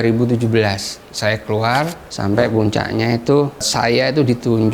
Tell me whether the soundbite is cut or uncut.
cut